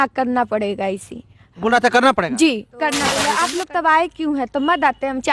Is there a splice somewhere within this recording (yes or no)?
yes